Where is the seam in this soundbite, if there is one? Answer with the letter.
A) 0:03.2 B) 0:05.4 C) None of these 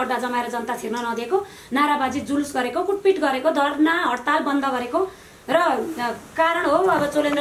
C